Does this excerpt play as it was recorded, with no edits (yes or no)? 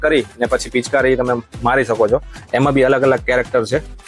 yes